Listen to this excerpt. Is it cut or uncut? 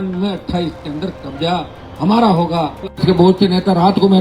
cut